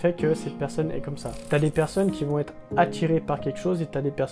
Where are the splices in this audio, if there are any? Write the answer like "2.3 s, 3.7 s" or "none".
1.3 s